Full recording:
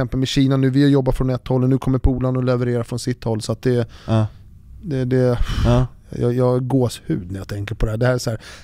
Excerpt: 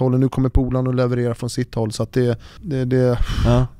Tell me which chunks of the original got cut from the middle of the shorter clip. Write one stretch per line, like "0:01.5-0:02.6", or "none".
0:04.0-0:04.7